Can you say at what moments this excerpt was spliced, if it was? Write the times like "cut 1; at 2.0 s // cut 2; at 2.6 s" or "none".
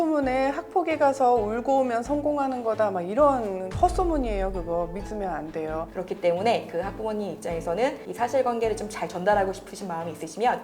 cut 1; at 5.9 s // cut 2; at 8.0 s